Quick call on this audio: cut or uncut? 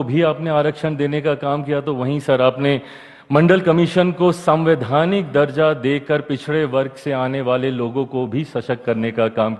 uncut